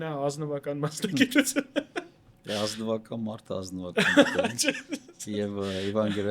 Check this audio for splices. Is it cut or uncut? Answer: uncut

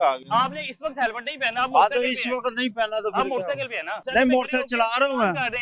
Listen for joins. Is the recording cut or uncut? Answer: cut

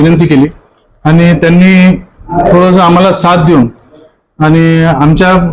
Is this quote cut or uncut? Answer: uncut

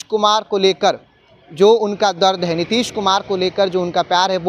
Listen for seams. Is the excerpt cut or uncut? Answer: uncut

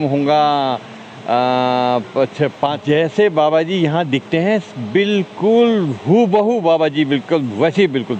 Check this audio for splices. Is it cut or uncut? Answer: cut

